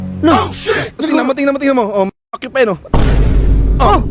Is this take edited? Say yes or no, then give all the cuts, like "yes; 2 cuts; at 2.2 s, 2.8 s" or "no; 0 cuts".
yes; 1 cut; at 1.0 s